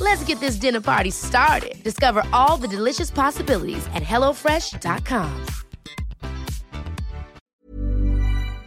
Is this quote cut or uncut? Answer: cut